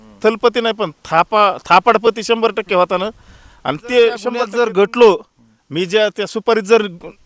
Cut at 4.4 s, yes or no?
yes